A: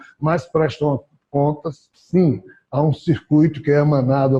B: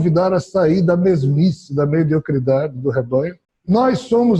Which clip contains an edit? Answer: B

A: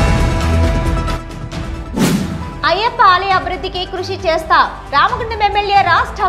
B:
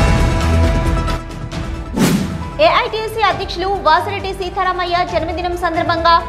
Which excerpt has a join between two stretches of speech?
B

